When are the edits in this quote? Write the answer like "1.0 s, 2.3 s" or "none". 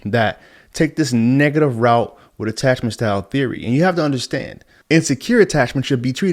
none